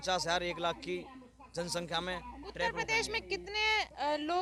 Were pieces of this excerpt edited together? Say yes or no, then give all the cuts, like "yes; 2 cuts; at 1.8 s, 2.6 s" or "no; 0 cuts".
no; 0 cuts